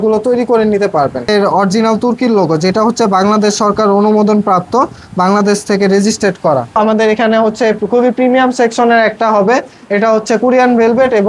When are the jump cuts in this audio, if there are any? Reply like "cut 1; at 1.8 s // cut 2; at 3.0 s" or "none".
cut 1; at 1.3 s // cut 2; at 6.8 s